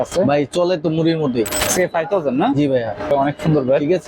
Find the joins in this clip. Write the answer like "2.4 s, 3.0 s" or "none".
1.6 s, 3.1 s